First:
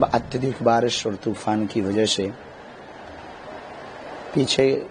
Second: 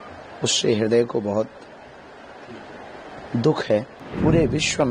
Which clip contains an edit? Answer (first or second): second